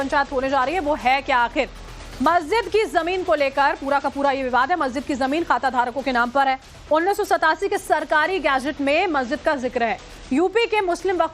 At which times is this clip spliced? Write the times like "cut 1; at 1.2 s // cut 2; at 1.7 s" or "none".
cut 1; at 4.4 s